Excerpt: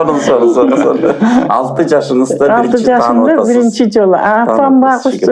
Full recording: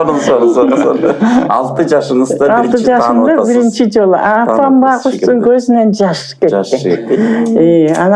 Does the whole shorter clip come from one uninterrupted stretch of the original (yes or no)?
yes